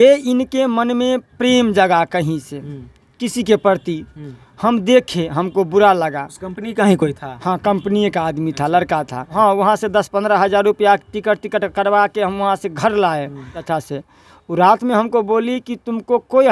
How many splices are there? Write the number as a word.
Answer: two